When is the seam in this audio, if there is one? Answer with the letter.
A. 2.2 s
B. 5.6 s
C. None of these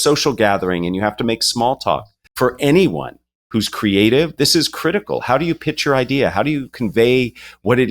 A